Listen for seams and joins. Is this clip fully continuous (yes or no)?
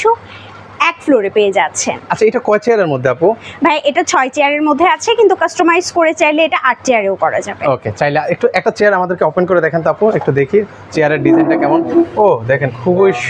yes